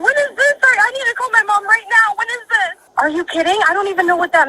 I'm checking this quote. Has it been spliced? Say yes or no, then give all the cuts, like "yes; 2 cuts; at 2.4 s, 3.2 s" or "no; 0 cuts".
yes; 1 cut; at 2.8 s